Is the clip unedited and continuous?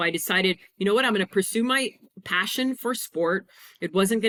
yes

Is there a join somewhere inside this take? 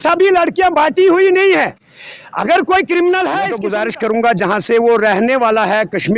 yes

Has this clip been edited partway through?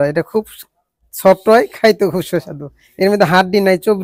no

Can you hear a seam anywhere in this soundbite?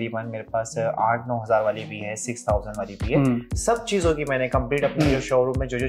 yes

